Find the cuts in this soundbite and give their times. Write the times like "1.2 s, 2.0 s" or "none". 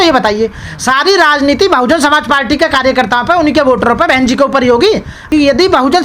5.1 s

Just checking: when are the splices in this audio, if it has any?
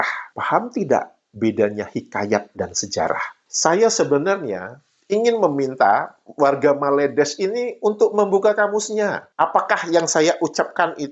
3.3 s

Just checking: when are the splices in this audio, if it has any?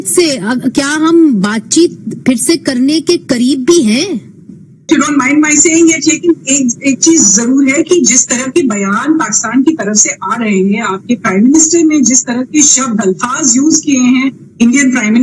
4.8 s

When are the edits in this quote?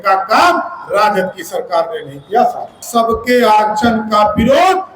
2.8 s

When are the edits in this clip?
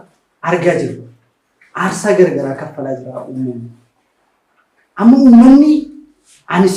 none

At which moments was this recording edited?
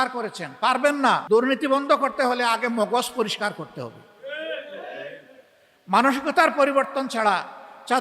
1.2 s

